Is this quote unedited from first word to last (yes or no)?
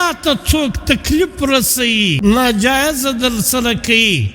no